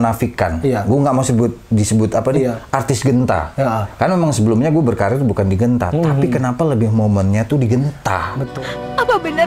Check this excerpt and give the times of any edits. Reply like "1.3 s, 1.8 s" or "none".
8.4 s